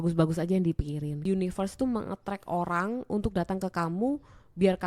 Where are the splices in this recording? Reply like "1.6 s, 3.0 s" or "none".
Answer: 1.2 s

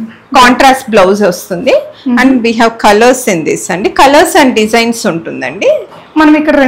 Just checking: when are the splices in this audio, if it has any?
none

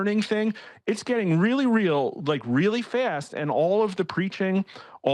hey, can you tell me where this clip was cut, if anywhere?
none

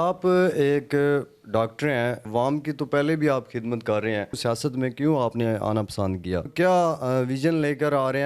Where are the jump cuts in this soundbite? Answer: 6.5 s

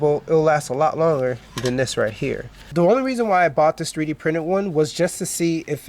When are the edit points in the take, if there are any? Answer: 2.6 s

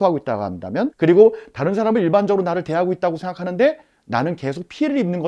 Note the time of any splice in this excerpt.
0.9 s

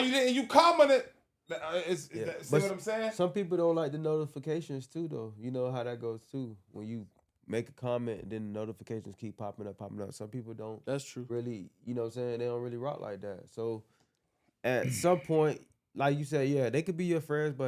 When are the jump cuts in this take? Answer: none

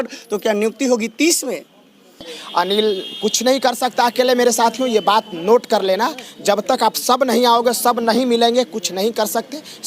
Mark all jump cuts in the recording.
2.4 s

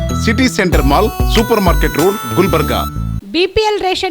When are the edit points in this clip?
3.2 s

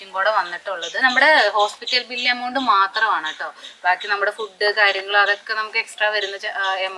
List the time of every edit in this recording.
1.0 s

